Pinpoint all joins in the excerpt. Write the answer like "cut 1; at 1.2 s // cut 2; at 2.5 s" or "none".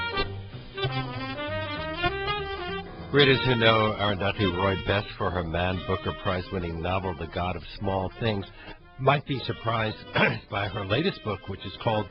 cut 1; at 2.9 s